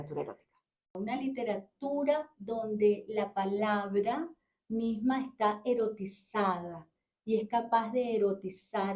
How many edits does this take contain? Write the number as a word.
one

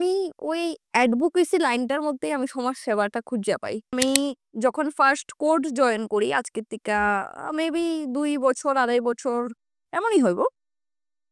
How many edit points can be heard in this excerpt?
one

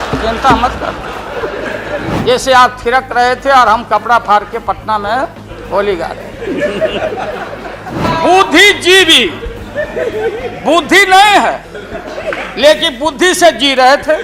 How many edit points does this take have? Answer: two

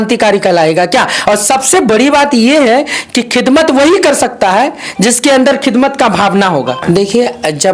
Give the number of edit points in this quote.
two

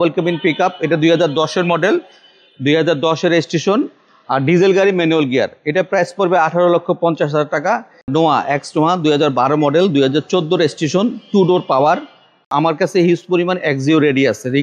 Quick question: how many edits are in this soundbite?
two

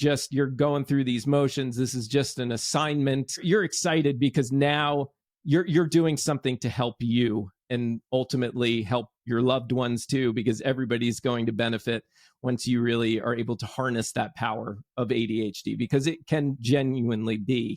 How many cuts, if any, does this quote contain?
three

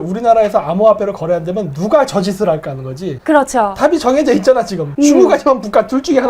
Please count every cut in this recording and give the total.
two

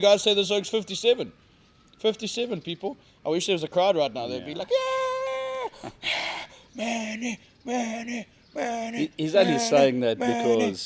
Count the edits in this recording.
zero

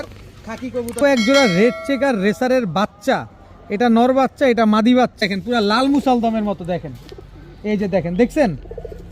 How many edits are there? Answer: two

